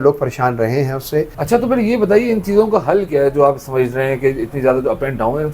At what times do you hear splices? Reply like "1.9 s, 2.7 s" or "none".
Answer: 1.3 s